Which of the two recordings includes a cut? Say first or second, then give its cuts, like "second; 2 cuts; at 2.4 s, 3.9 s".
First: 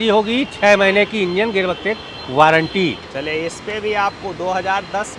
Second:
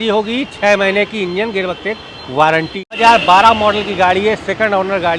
second; 1 cut; at 3.0 s